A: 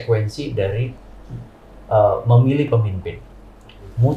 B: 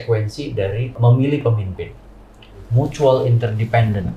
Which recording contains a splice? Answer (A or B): B